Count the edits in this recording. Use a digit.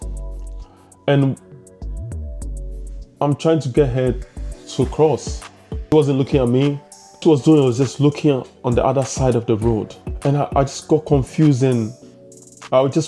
3